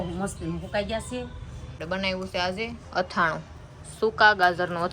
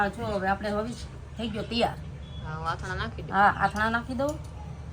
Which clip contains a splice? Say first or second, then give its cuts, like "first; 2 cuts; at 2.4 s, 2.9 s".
first; 1 cut; at 1.8 s